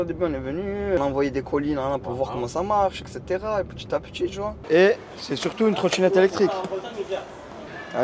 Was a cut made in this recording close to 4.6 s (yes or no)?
yes